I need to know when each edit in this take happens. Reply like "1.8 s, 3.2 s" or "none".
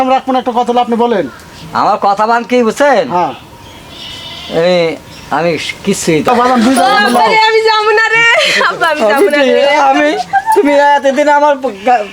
6.3 s